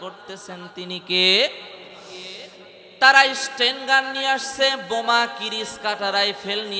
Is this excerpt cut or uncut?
uncut